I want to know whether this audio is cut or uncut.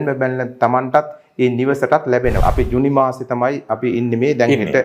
cut